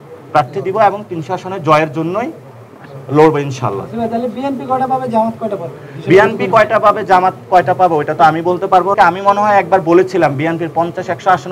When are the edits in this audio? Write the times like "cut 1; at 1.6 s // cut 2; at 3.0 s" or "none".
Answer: cut 1; at 8.9 s